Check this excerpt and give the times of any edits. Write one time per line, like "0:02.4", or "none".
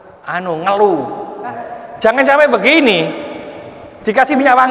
0:01.6